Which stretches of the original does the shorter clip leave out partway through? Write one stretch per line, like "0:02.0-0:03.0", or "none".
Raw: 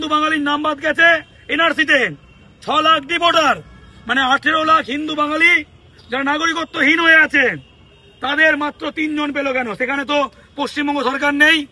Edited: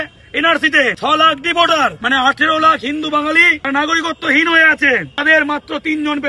0:02.1-0:02.6
0:03.6-0:04.0
0:05.7-0:06.1
0:07.7-0:08.3